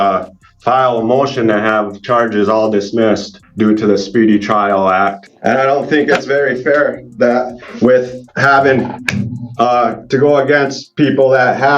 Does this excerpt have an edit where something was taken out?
yes; 2 cuts; at 3.4 s, 5.3 s

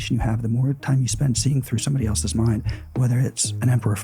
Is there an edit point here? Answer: no; 0 cuts

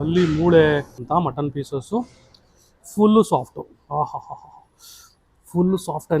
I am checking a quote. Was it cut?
yes; 1 cut; at 1.0 s

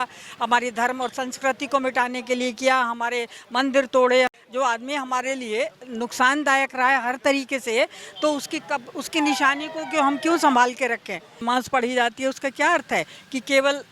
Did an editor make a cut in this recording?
yes; 2 cuts; at 4.3 s, 11.4 s

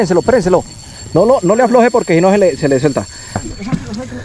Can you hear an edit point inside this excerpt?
yes; 1 cut; at 3.3 s

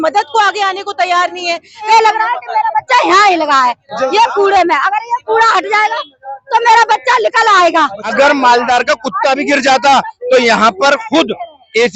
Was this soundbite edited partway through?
yes; 2 cuts; at 1.9 s, 8.1 s

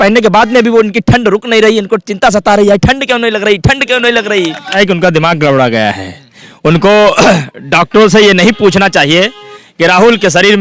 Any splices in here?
yes; 1 cut; at 4.8 s

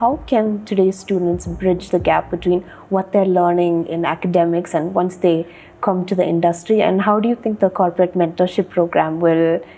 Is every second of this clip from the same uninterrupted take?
yes; 0 cuts

